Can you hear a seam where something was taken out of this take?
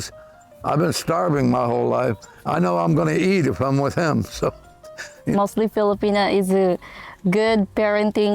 no; 0 cuts

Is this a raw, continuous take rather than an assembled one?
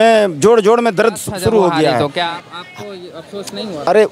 no; 1 cut; at 2.1 s

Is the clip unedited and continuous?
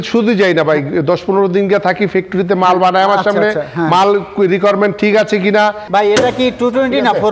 no; 1 cut; at 5.8 s

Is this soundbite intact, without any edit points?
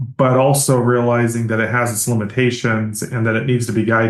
yes; 0 cuts

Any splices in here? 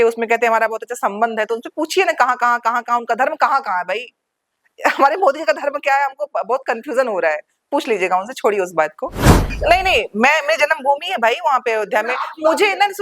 yes; 1 cut; at 9.5 s

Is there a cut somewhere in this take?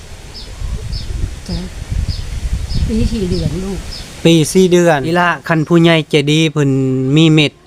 yes; 1 cut; at 5.2 s

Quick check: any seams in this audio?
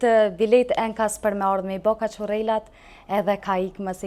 no; 0 cuts

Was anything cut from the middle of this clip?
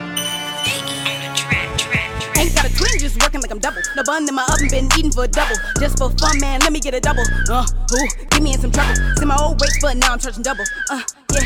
no; 0 cuts

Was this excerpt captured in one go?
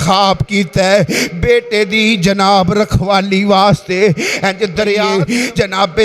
no; 1 cut; at 5.1 s

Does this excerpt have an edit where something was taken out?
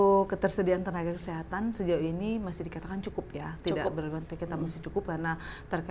no; 0 cuts

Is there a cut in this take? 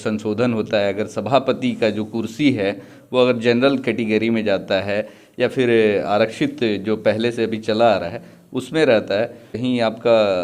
yes; 1 cut; at 9.5 s

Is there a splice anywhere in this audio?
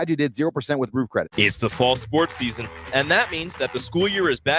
yes; 1 cut; at 1.3 s

